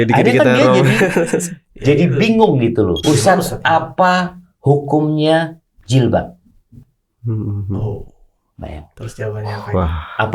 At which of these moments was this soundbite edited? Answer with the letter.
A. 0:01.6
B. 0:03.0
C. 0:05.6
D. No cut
B